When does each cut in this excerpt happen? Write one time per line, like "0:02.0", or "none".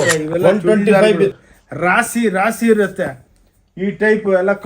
0:01.3